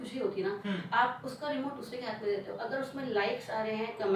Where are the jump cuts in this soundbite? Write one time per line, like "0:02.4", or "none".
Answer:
none